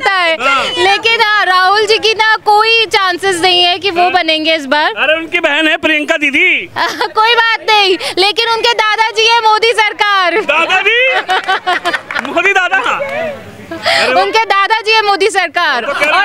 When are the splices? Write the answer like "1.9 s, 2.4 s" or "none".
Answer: none

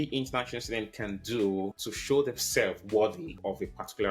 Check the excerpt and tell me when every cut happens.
1.9 s

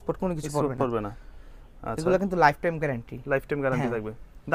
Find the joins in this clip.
none

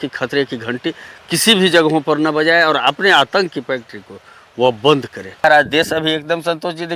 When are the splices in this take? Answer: 5.4 s

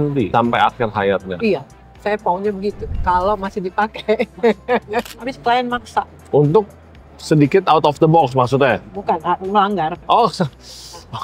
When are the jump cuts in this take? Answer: 5.1 s

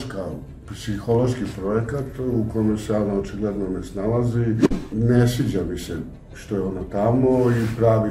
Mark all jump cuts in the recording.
4.8 s

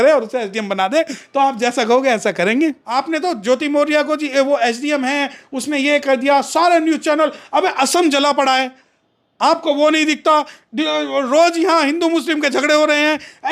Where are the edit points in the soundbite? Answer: 2.9 s

